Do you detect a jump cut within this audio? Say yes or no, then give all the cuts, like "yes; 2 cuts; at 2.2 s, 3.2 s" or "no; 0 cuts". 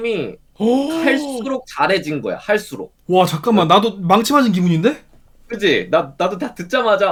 no; 0 cuts